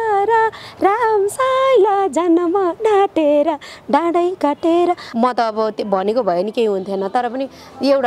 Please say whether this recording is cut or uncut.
cut